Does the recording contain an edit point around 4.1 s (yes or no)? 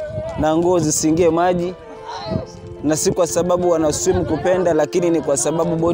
no